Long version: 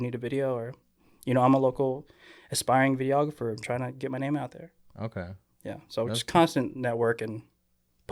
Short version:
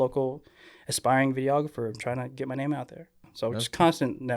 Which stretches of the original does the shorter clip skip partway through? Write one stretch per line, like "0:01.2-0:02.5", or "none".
0:04.8-0:05.7

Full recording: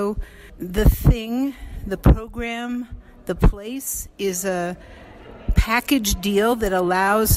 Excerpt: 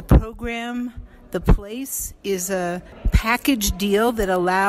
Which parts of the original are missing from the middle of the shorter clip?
0:04.9-0:05.4

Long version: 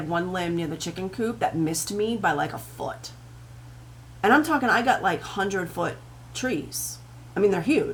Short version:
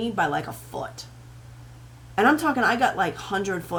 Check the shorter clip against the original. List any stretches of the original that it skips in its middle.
none

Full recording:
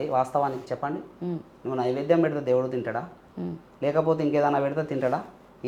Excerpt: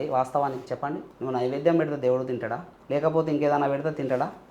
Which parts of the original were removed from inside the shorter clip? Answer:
0:01.1-0:01.5
0:03.2-0:03.6

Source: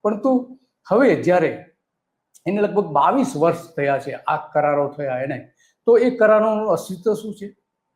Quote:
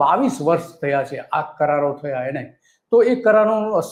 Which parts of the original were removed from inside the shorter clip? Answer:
none

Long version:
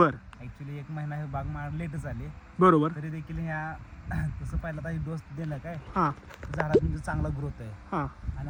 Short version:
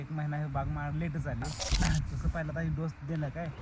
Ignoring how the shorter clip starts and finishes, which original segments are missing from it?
0:02.4-0:03.9

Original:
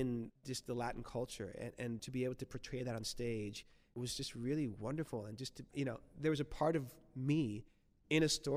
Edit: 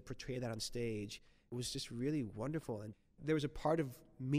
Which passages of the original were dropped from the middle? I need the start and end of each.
0:05.5-0:06.1

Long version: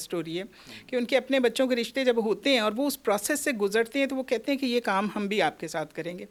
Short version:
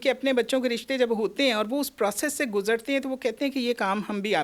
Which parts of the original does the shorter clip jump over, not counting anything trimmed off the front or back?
none

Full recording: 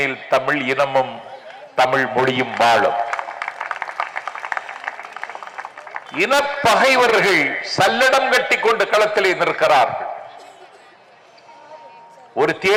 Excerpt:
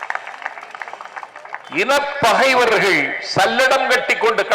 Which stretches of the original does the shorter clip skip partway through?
none

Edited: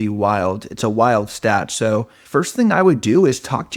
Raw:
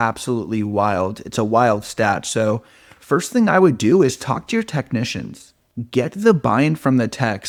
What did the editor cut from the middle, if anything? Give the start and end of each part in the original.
0:02.7-0:02.9

